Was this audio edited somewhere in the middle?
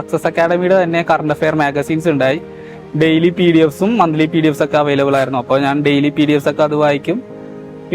no; 0 cuts

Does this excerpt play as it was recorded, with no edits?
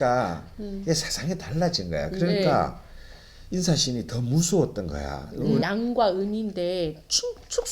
no; 1 cut; at 5.6 s

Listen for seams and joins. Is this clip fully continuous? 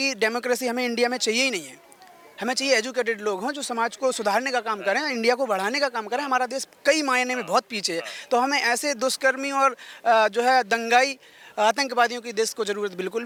yes; 0 cuts

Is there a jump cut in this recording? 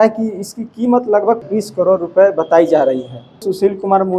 yes; 2 cuts; at 1.4 s, 3.4 s

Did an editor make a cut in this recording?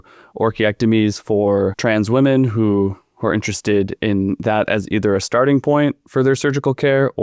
no; 0 cuts

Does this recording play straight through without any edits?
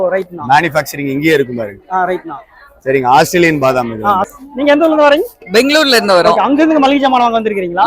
no; 1 cut; at 4.4 s

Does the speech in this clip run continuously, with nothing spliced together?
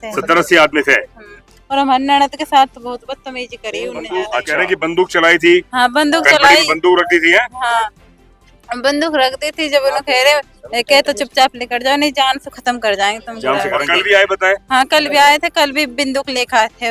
no; 2 cuts; at 4.4 s, 13.8 s

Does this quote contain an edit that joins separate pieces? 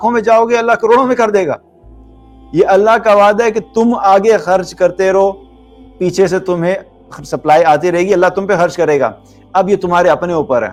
no; 0 cuts

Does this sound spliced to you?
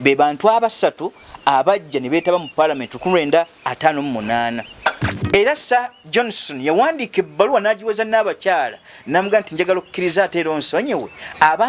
yes; 1 cut; at 5.1 s

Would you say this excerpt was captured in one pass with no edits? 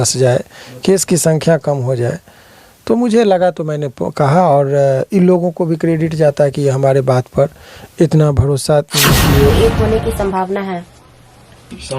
no; 1 cut; at 9.5 s

